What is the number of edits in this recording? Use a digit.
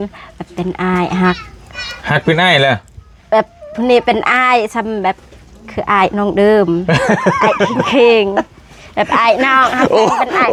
0